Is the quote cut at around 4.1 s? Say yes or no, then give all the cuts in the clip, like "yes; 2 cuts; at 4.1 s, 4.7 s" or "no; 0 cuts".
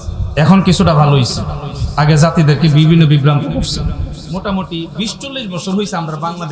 yes; 1 cut; at 4.1 s